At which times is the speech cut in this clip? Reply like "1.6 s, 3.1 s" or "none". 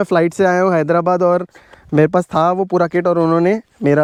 none